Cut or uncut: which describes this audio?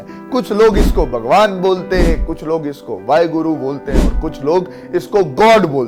uncut